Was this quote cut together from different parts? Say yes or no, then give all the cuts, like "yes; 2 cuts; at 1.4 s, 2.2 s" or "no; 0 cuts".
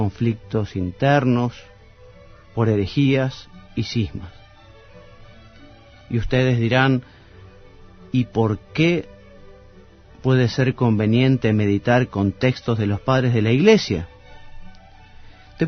no; 0 cuts